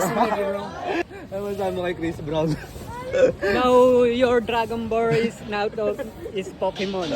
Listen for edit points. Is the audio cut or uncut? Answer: cut